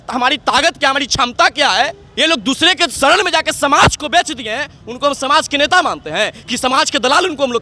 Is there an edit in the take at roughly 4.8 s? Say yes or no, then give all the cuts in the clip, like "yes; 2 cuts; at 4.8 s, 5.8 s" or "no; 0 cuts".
no; 2 cuts; at 2.0 s, 2.9 s